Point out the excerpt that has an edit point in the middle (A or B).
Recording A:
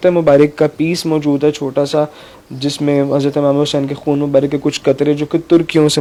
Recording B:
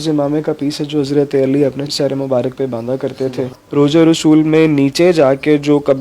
B